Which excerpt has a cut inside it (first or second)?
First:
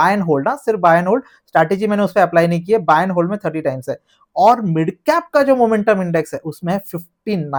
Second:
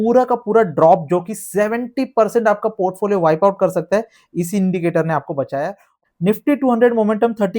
second